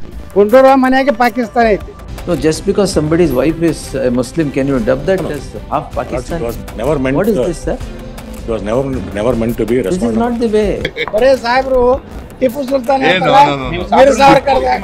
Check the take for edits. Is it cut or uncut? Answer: cut